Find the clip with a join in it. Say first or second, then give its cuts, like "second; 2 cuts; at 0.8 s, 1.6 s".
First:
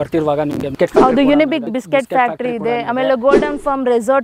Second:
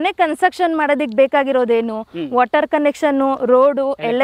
first; 1 cut; at 1.7 s